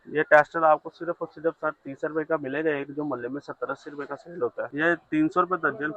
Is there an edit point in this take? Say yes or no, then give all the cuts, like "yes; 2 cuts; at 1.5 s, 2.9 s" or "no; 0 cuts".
yes; 1 cut; at 4.7 s